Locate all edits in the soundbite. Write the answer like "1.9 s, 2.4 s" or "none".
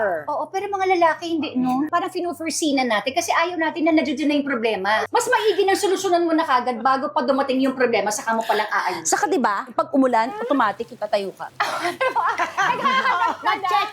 1.9 s, 5.1 s, 11.4 s